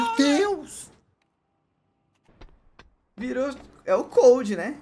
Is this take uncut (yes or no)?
no